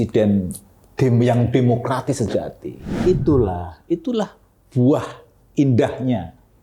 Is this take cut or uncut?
cut